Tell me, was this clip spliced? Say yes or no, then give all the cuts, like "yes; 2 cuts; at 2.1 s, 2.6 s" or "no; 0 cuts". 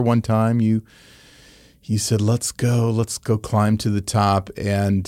no; 0 cuts